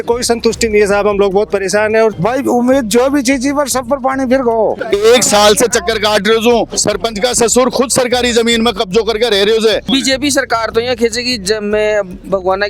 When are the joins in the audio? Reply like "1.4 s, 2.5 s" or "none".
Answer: 2.1 s, 4.8 s, 6.8 s, 9.8 s

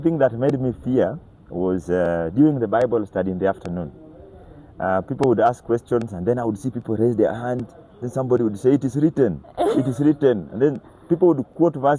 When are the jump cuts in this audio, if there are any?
none

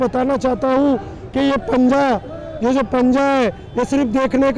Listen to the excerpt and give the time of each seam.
none

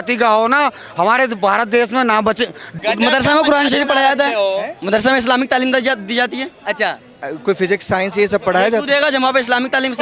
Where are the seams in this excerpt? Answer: 2.7 s

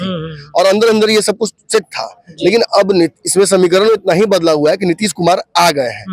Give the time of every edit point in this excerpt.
none

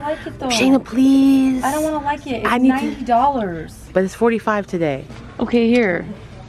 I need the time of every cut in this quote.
5.0 s

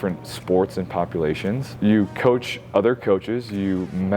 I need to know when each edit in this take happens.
1.7 s

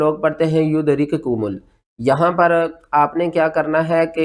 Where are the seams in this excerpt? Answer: none

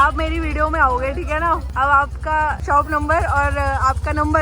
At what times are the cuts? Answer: 1.7 s, 2.6 s

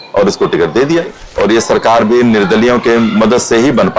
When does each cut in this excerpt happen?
1.2 s

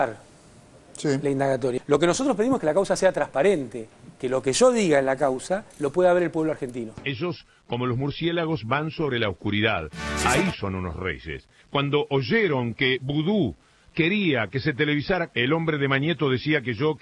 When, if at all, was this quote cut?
1.8 s, 6.9 s

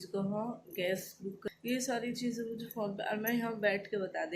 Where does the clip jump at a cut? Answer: 1.4 s

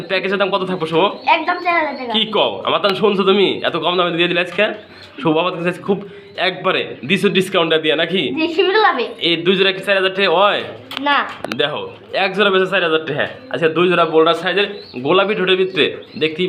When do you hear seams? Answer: none

